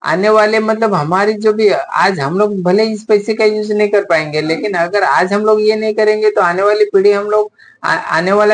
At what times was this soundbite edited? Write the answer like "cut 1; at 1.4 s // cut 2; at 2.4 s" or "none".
none